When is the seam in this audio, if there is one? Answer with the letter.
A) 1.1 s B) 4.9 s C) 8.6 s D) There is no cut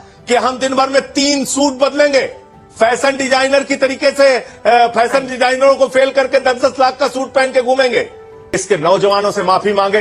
C